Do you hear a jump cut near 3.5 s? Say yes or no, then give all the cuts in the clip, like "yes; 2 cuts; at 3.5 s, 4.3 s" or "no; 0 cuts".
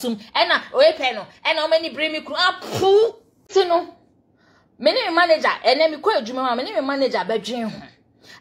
yes; 1 cut; at 3.5 s